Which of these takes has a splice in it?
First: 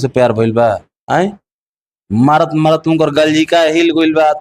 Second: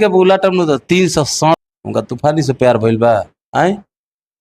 second; 1 cut; at 1.5 s

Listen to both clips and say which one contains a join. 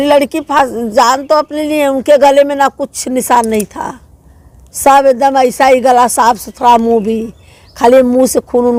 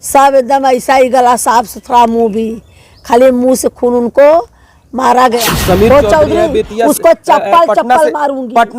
second; 1 cut; at 5.5 s

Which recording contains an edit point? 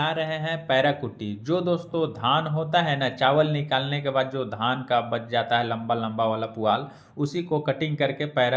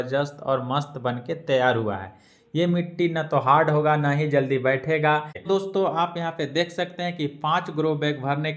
second; 1 cut; at 5.3 s

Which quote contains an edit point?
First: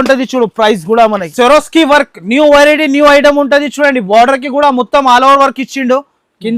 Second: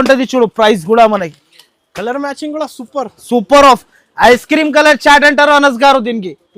first; 1 cut; at 1.3 s

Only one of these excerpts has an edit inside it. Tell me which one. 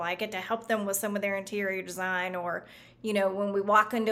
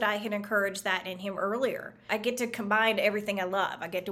second; 1 cut; at 2.1 s

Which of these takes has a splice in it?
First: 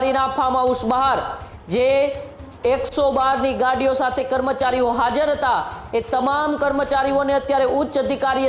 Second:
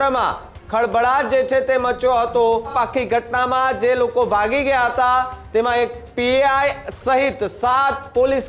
second; 1 cut; at 2.7 s

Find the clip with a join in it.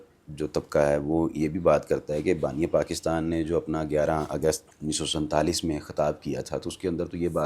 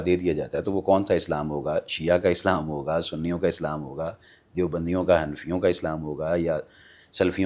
first; 1 cut; at 4.7 s

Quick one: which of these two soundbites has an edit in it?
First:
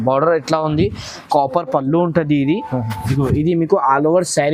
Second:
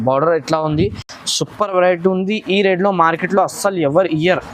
first; 1 cut; at 1.2 s

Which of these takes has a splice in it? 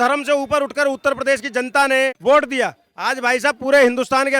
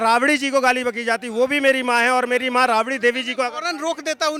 first; 1 cut; at 2.2 s

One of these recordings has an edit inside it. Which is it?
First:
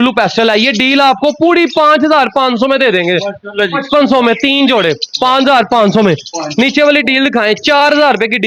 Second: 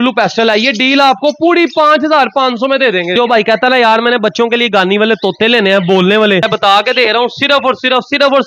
second; 2 cuts; at 3.1 s, 6.5 s

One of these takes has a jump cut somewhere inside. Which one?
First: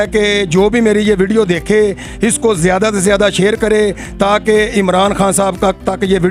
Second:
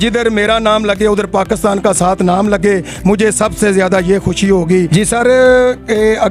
second; 1 cut; at 4.7 s

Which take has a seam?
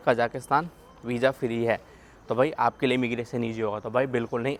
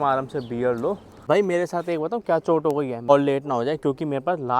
second; 2 cuts; at 1.2 s, 3.1 s

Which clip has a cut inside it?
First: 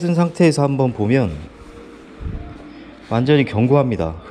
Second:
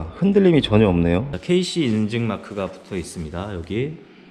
second; 1 cut; at 1.3 s

